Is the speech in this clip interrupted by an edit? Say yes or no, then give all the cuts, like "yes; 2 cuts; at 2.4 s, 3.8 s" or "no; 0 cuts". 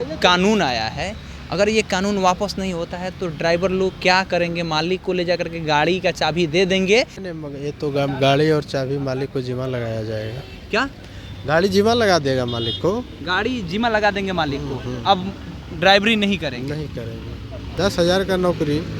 yes; 2 cuts; at 7.2 s, 17.6 s